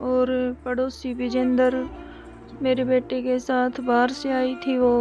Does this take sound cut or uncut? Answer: uncut